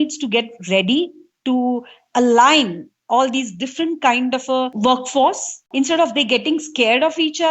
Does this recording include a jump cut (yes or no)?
yes